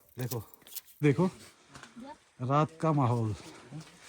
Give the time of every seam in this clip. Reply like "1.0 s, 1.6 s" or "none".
1.0 s